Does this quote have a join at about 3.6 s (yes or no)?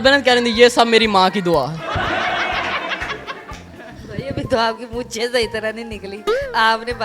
yes